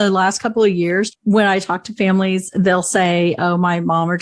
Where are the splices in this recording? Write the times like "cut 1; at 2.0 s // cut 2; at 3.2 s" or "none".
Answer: cut 1; at 1.1 s